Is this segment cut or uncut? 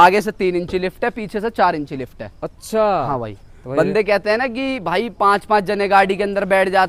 uncut